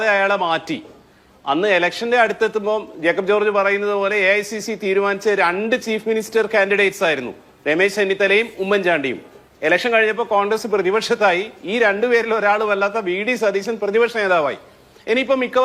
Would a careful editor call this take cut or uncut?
uncut